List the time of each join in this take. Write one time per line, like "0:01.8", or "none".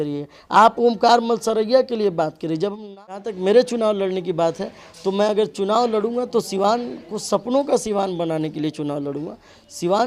0:02.8